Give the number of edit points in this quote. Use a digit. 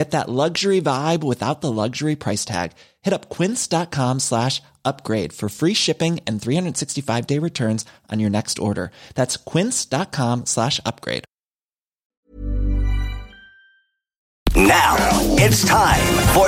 1